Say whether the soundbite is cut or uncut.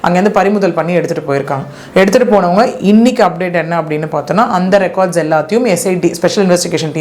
uncut